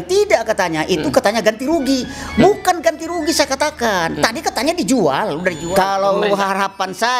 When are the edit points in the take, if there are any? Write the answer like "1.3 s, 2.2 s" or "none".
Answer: 5.6 s